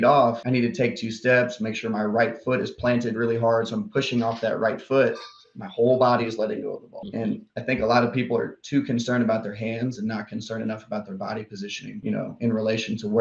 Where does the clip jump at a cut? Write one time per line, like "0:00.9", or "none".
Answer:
none